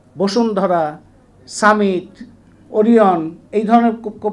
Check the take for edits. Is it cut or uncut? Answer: uncut